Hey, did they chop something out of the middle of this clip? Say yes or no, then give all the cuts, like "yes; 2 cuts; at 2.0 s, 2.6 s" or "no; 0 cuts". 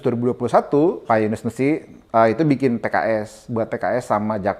yes; 1 cut; at 1.0 s